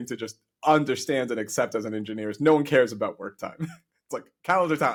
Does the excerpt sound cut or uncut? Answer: uncut